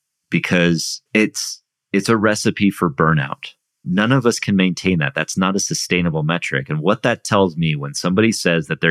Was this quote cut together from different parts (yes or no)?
yes